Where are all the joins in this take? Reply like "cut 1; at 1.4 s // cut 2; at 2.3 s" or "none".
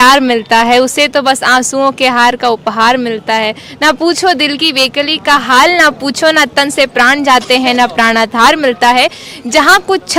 none